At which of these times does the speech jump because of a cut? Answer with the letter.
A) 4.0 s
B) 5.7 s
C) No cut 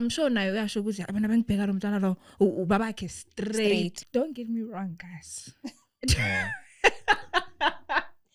A